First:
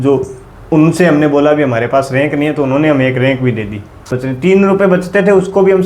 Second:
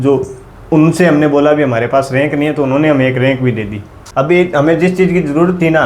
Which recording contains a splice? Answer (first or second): first